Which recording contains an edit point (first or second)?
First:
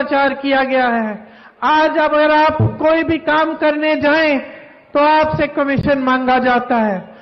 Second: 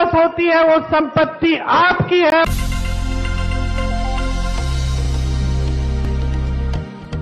second